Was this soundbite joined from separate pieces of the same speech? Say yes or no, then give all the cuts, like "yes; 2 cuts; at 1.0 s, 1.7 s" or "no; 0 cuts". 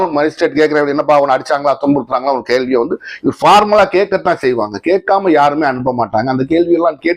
no; 0 cuts